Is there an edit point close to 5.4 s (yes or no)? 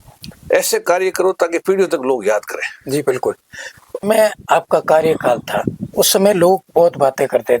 no